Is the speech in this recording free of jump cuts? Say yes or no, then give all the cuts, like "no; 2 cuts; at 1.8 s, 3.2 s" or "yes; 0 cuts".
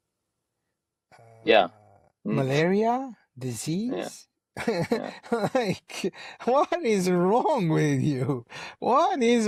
yes; 0 cuts